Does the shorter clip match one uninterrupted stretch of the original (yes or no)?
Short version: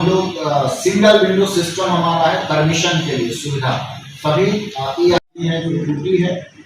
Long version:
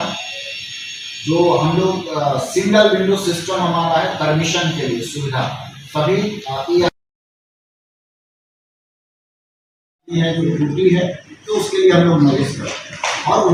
no